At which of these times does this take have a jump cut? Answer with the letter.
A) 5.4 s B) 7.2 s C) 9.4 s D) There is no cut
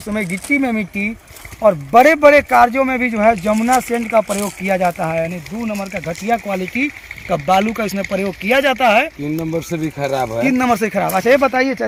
D